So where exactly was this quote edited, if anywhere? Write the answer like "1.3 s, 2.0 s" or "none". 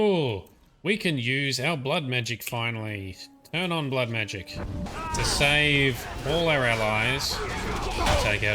4.8 s